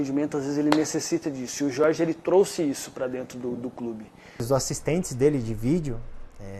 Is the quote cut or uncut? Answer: cut